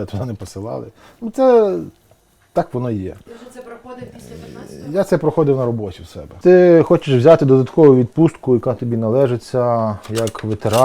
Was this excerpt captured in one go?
yes; 0 cuts

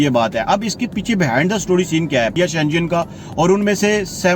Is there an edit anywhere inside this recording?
yes; 1 cut; at 2.5 s

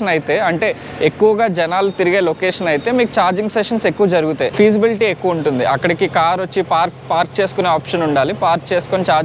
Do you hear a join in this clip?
no; 0 cuts

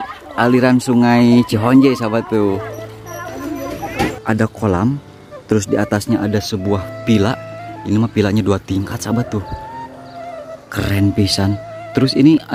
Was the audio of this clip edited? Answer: yes; 1 cut; at 4.2 s

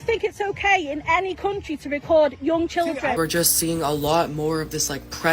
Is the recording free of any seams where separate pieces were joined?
no; 1 cut; at 3.1 s

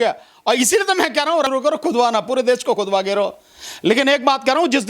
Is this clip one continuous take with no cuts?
no; 1 cut; at 1.5 s

